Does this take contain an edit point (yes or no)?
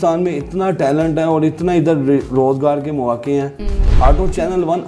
yes